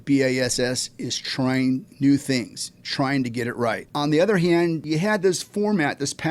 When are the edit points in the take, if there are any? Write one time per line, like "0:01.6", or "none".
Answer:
0:03.8
0:04.8